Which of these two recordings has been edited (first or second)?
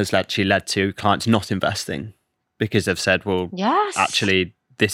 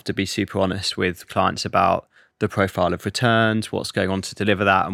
second